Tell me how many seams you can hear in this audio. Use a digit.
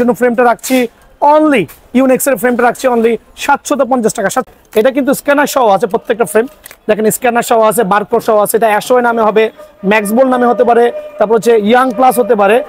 1